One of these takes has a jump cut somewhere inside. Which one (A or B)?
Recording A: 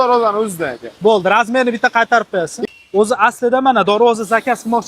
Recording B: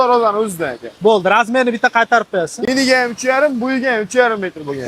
A